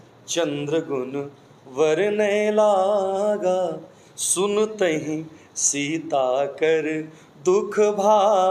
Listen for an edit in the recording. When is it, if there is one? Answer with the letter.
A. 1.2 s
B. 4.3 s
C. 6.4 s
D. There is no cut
D